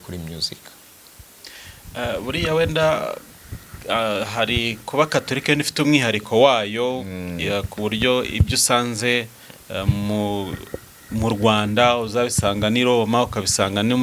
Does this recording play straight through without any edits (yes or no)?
yes